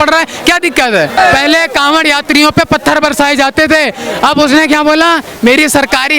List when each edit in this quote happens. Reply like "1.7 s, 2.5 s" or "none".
1.2 s